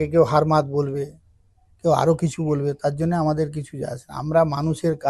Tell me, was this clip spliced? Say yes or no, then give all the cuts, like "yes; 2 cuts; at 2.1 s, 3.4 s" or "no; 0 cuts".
no; 0 cuts